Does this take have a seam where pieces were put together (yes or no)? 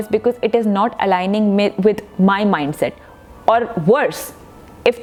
no